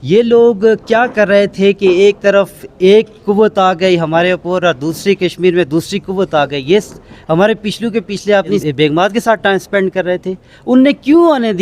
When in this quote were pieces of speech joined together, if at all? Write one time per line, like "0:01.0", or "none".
0:08.9